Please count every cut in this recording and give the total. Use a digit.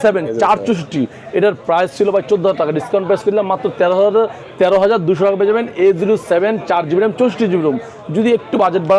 0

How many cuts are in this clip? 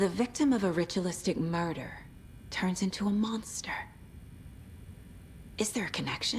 2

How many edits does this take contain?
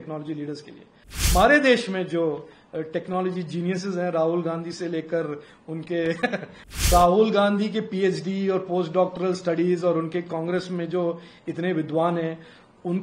2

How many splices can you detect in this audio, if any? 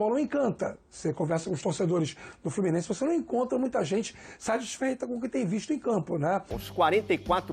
1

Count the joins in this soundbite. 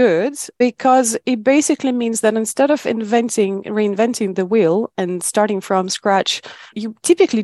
0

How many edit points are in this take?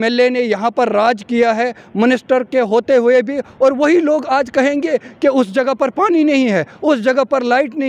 0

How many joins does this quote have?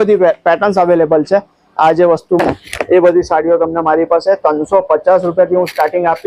1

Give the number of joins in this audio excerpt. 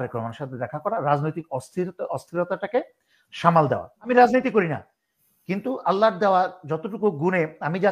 1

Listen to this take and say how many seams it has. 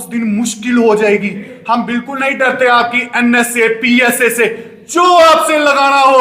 1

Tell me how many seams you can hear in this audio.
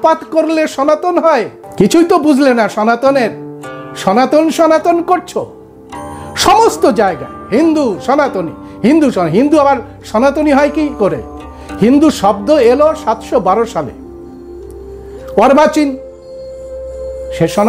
1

